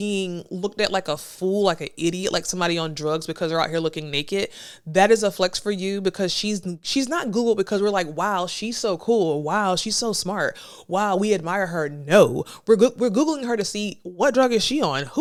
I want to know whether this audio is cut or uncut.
uncut